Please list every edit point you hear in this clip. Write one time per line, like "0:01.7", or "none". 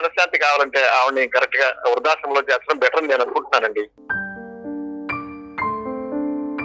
0:04.0